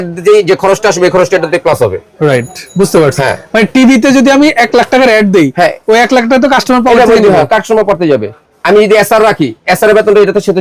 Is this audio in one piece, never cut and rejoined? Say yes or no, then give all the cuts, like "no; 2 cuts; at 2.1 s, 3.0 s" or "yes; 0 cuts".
yes; 0 cuts